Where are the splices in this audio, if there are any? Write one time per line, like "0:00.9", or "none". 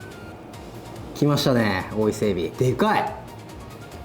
0:02.5

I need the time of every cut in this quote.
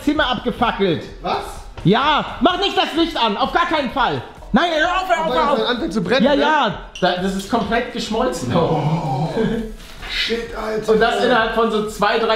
0:04.4
0:06.9

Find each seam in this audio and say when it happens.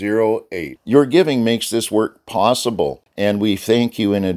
0:03.0

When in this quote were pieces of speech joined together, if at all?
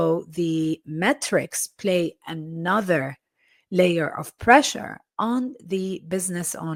none

